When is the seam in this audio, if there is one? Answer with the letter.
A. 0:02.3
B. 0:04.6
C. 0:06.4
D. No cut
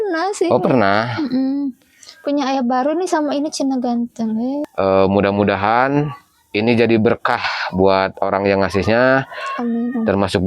B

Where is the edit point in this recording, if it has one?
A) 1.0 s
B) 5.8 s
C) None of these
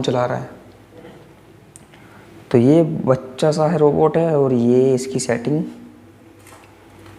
A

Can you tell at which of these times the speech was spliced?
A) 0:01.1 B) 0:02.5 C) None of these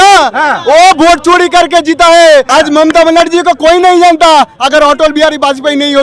B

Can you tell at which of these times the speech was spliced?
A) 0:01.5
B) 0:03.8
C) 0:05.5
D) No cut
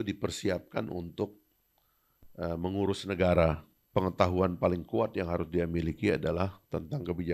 B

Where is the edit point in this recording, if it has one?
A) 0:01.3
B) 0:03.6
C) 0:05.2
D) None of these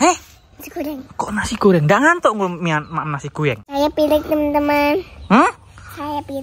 B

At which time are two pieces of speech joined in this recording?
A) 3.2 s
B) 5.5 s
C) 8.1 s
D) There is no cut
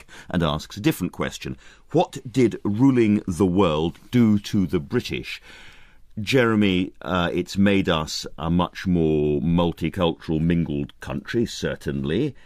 C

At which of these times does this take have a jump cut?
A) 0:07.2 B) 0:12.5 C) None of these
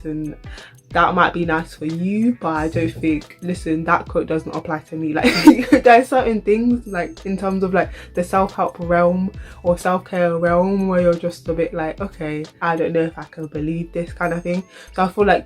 B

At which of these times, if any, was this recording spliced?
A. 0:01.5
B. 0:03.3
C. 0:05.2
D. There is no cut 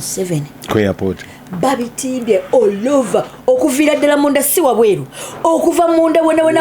D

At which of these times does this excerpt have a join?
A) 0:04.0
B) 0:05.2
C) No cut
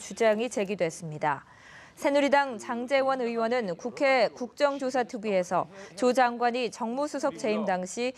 A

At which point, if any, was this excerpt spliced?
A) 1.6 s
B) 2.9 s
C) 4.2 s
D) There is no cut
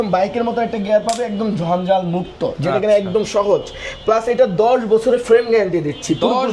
D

